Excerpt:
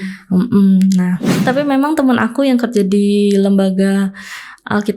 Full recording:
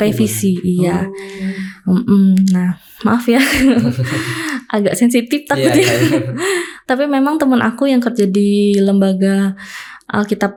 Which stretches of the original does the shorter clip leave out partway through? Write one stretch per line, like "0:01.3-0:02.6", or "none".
0:02.9-0:06.7